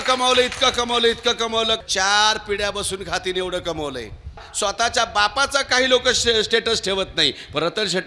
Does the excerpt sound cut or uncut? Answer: cut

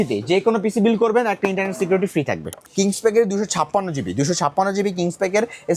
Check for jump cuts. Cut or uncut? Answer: cut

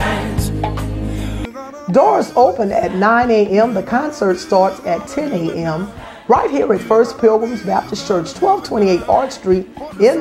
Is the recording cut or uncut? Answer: cut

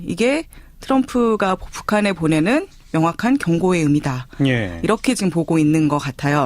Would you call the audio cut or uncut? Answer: cut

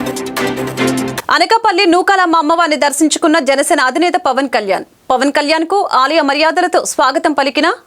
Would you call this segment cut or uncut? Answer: cut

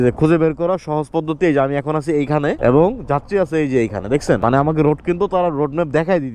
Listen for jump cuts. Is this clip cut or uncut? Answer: uncut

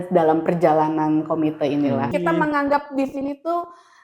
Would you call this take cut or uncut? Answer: cut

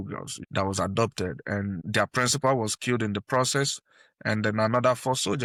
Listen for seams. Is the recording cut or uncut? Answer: uncut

